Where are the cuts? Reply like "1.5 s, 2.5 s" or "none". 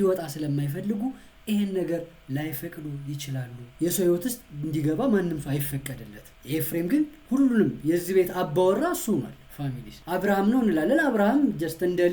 3.7 s